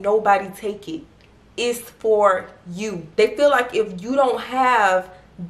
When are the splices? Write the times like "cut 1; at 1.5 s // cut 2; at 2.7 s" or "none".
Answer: cut 1; at 3.0 s